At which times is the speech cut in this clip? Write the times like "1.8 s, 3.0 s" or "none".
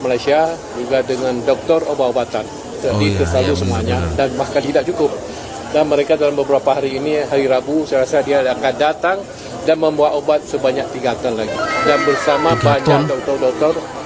none